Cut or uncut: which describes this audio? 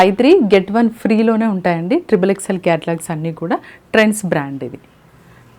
uncut